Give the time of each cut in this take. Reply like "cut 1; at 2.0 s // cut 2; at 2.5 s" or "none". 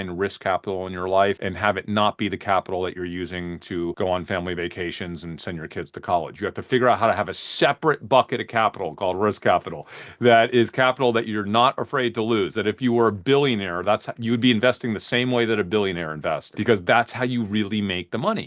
cut 1; at 1.5 s // cut 2; at 4.0 s // cut 3; at 16.5 s